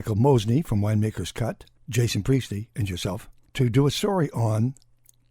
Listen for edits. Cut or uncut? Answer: cut